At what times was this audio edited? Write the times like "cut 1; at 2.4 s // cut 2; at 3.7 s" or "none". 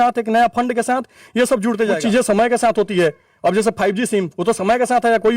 cut 1; at 2.0 s